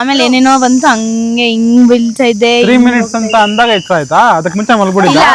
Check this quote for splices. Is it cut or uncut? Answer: uncut